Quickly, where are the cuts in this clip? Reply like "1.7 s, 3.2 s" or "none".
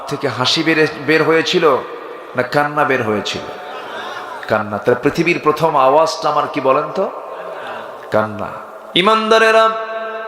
8.8 s